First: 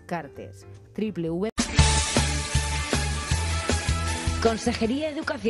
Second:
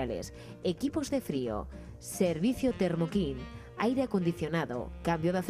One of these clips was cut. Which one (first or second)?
first